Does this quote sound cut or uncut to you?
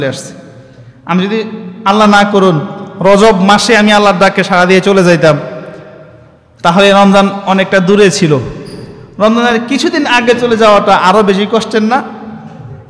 uncut